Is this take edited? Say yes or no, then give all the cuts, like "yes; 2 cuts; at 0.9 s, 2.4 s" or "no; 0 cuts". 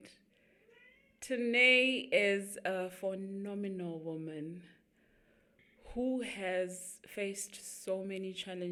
no; 0 cuts